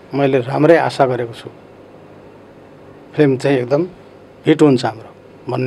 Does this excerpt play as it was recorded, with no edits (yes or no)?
yes